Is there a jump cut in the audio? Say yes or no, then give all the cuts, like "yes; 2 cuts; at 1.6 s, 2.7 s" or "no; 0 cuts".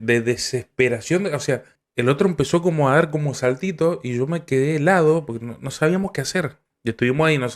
yes; 2 cuts; at 1.8 s, 6.6 s